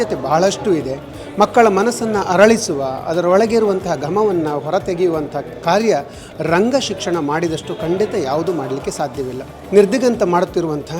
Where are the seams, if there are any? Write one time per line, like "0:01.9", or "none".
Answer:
0:09.5